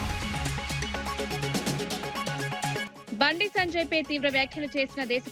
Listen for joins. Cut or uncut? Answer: cut